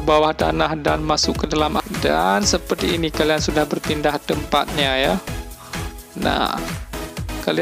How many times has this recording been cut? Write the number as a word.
one